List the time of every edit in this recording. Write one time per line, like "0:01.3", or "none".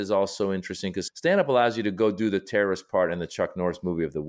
0:01.1

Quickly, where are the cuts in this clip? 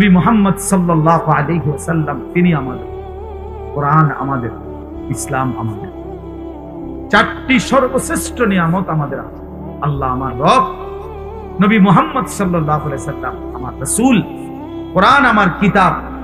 none

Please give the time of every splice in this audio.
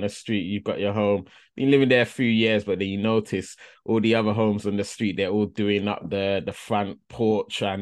none

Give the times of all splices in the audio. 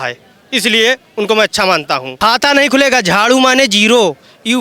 0:02.1

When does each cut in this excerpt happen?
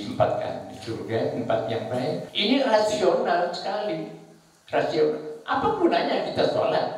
0:02.3

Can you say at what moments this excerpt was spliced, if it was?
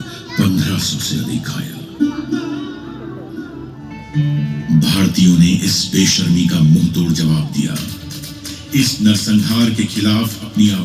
0:03.8

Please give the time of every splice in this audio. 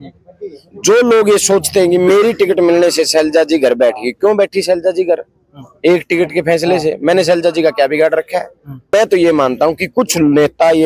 0:08.9

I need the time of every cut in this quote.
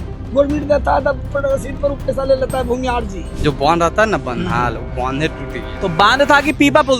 0:03.2

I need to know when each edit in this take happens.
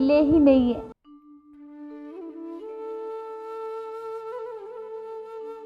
0:01.0

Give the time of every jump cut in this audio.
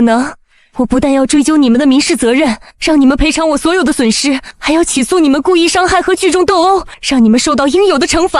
0:02.7
0:04.5
0:07.0

